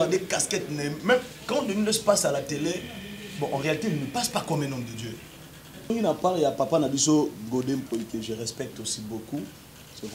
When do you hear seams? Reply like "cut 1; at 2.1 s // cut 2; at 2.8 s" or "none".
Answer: cut 1; at 5.9 s